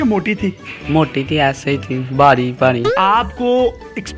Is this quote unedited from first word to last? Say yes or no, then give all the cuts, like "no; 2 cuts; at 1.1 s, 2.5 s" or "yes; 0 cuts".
no; 1 cut; at 2.9 s